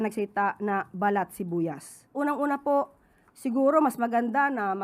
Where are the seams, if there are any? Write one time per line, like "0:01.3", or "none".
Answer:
0:02.1